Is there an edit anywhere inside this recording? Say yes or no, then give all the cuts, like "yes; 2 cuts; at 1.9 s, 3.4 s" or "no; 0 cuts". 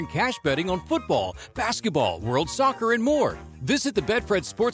no; 0 cuts